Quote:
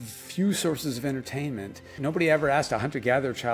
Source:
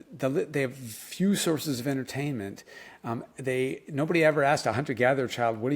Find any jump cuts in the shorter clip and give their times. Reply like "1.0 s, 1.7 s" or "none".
1.9 s